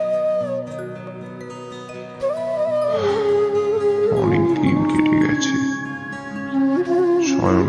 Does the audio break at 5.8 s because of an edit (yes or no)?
no